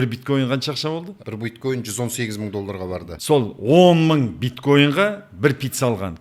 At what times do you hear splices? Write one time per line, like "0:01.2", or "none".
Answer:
0:01.2
0:03.1